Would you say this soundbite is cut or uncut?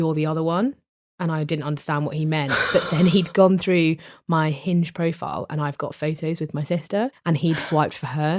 cut